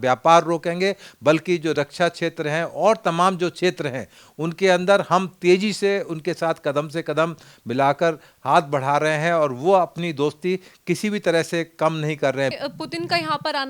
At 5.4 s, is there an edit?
no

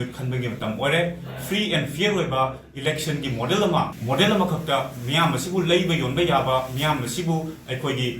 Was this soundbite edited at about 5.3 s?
no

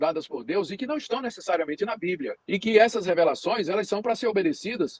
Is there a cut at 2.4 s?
yes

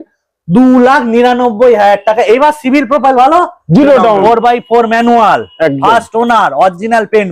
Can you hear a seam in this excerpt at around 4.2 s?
yes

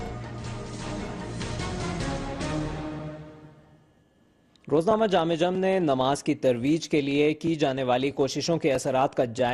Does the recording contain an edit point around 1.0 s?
no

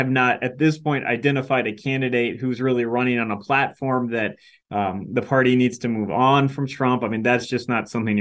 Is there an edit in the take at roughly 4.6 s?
no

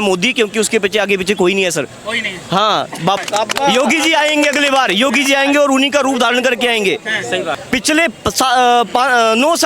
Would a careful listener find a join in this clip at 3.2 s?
yes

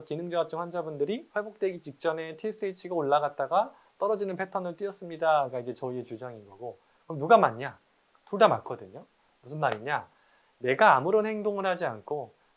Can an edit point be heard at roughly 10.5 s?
yes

